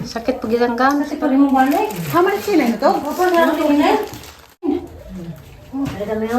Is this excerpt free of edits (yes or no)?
no